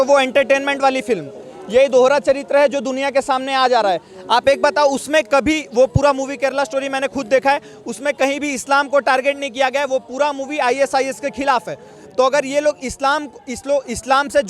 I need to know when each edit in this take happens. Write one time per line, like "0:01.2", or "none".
none